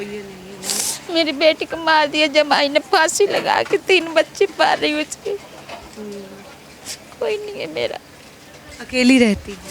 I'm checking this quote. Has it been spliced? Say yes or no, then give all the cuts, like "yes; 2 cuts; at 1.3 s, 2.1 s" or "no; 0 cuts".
no; 0 cuts